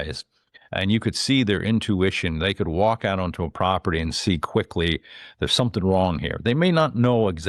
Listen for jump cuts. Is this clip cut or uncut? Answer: uncut